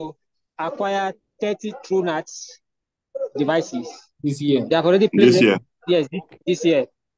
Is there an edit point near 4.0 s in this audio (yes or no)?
yes